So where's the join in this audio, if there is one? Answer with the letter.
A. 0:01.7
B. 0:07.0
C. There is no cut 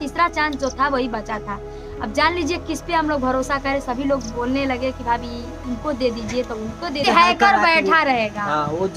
B